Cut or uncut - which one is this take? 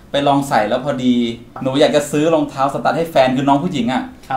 cut